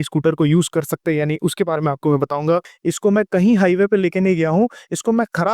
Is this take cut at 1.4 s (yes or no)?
no